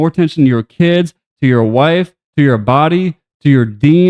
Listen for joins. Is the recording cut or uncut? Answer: cut